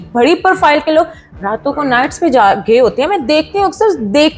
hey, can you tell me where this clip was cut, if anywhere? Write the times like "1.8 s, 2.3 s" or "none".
none